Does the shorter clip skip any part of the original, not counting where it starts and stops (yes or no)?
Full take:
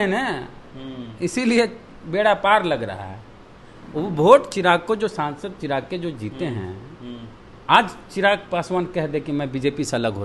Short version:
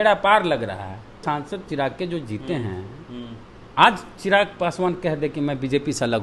yes